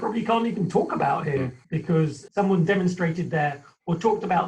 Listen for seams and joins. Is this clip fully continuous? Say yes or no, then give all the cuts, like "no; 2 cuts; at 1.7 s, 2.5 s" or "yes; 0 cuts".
no; 1 cut; at 1.9 s